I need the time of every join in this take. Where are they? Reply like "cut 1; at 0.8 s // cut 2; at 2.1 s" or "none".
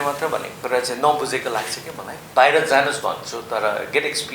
cut 1; at 2.2 s